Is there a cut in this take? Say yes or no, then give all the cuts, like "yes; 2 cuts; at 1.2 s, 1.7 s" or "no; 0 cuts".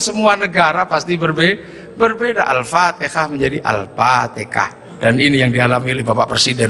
no; 0 cuts